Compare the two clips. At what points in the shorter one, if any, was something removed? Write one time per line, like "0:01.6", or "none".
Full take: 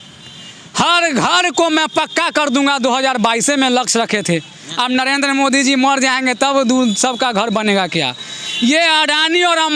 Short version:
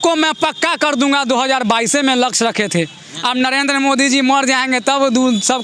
none